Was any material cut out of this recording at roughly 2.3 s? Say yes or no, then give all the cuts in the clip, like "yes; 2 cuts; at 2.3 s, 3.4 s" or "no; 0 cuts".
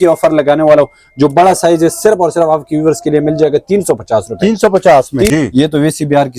no; 1 cut; at 5.3 s